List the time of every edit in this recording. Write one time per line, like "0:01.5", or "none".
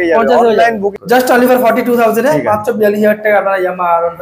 0:01.0